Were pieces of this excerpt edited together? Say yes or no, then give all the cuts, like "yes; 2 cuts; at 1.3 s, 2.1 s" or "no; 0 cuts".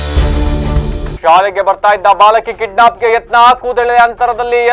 yes; 1 cut; at 1.1 s